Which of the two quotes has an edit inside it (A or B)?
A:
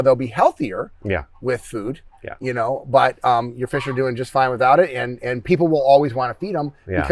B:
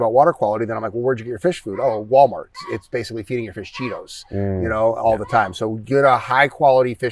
B